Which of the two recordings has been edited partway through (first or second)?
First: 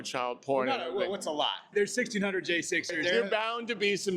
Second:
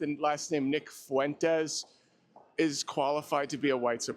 first